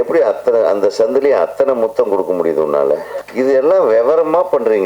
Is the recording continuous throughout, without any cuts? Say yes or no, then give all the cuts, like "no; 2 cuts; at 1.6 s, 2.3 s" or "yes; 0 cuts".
no; 1 cut; at 3.2 s